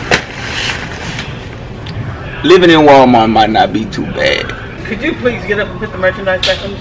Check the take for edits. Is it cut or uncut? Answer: cut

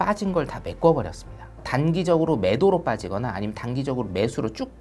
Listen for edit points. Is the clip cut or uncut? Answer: cut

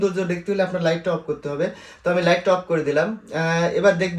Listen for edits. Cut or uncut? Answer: uncut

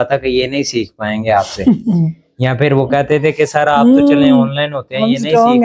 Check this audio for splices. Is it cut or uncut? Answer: uncut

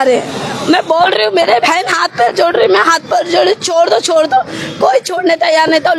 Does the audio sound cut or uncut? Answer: uncut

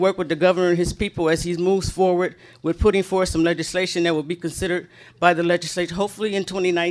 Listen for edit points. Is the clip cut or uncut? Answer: uncut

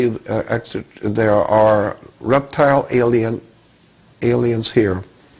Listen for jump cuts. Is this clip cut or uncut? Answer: uncut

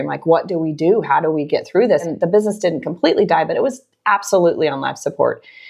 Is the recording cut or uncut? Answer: cut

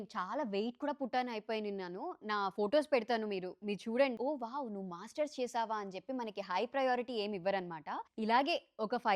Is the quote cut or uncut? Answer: cut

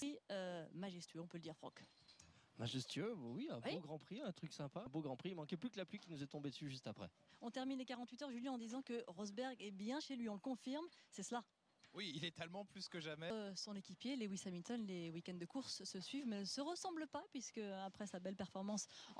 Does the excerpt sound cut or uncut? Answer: uncut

